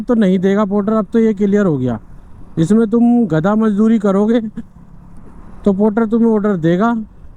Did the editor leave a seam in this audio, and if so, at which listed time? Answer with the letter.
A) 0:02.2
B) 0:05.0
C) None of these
C